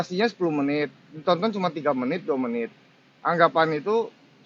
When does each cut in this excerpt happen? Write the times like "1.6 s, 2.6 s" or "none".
none